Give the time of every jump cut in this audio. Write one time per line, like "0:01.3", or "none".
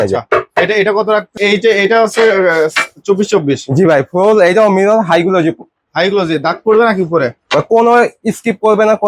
0:01.3